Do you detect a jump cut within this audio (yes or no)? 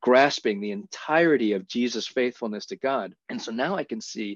yes